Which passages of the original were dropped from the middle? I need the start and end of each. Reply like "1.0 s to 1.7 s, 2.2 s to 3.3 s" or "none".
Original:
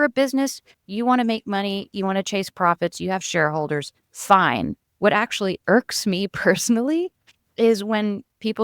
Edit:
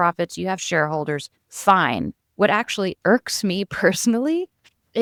none